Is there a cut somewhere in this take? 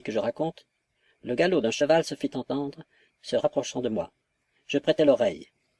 yes; 1 cut; at 2.1 s

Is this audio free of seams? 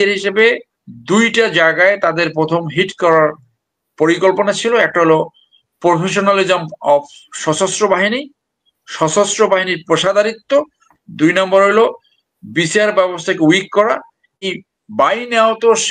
no; 1 cut; at 14.4 s

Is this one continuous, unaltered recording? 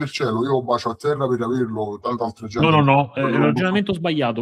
yes; 0 cuts

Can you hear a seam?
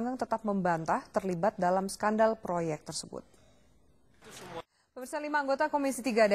yes; 1 cut; at 4.6 s

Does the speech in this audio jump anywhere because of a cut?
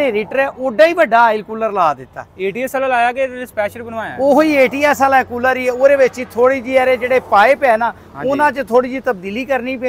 no; 0 cuts

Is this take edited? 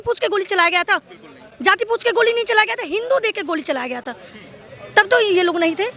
no; 0 cuts

